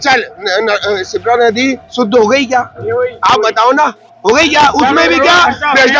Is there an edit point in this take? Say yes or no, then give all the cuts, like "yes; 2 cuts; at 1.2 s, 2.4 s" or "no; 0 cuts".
no; 0 cuts